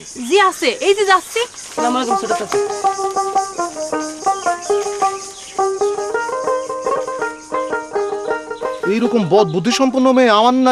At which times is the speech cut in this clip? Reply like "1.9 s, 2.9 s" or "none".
none